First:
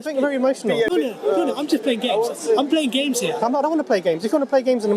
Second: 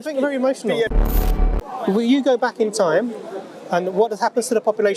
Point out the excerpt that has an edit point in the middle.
second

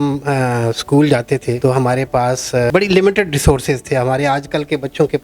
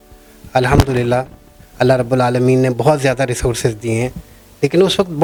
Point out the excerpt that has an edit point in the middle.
first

